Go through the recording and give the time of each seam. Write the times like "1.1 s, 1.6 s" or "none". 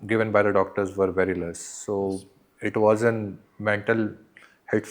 none

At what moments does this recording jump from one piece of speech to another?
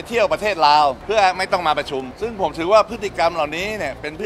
1.0 s, 2.1 s

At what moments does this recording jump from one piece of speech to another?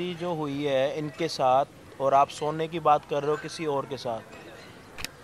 none

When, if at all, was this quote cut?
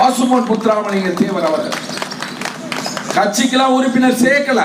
none

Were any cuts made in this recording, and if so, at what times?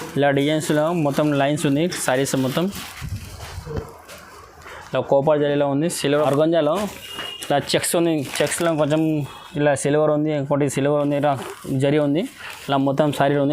6.0 s

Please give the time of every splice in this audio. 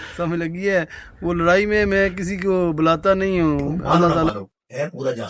4.3 s

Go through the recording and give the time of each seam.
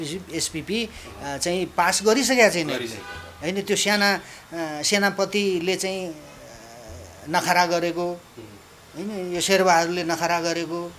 none

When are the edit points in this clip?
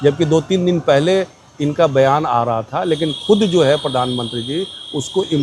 none

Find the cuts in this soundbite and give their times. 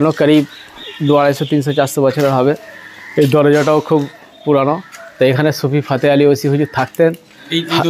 none

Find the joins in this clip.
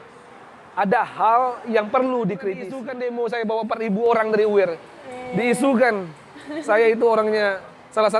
2.8 s

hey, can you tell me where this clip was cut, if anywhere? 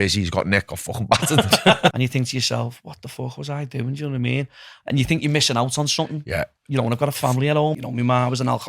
1.9 s, 7.8 s

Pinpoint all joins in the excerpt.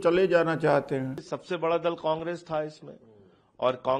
1.3 s

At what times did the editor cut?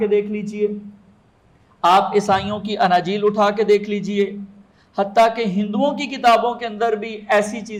none

